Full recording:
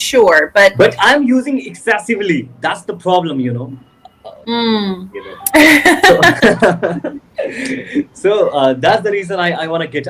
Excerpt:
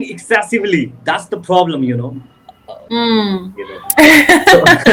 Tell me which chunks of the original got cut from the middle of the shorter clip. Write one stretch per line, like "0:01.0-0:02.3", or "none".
none